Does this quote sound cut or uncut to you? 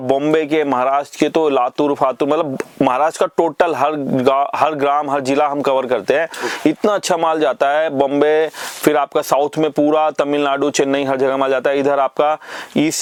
uncut